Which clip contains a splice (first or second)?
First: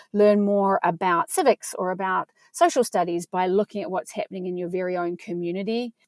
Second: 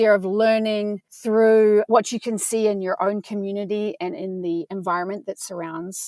second